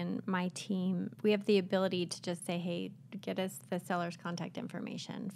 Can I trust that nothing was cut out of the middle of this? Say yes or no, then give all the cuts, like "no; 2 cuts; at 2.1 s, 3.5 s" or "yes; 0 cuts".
no; 1 cut; at 1.1 s